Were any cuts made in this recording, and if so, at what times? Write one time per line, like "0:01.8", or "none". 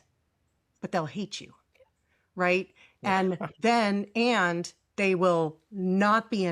none